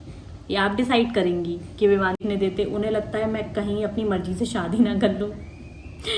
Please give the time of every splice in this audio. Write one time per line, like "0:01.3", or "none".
0:02.2